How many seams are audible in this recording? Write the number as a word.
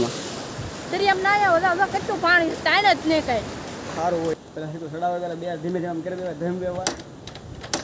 one